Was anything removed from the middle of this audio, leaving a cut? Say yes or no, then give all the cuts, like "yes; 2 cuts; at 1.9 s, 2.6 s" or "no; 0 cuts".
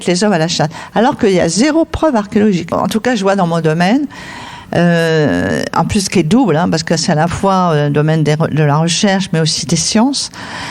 yes; 1 cut; at 2.7 s